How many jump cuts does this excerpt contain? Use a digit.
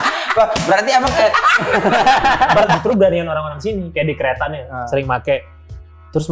1